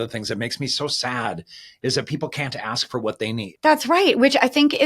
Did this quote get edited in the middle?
yes; 1 cut; at 3.5 s

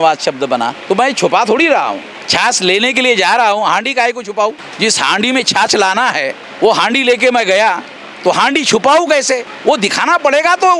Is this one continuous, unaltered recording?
yes; 0 cuts

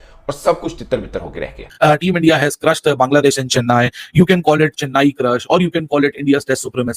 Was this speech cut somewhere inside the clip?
yes; 1 cut; at 1.6 s

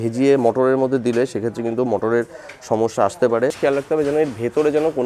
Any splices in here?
yes; 1 cut; at 3.6 s

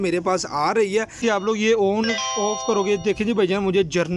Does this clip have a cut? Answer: yes; 1 cut; at 1.2 s

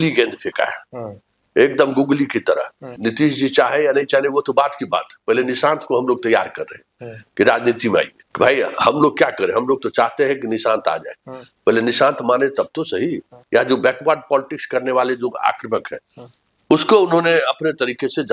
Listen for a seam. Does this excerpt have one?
yes; 3 cuts; at 2.8 s, 8.2 s, 13.3 s

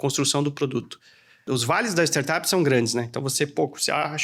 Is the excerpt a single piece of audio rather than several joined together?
no; 1 cut; at 1.5 s

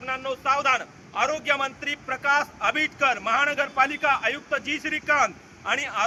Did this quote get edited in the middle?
no; 0 cuts

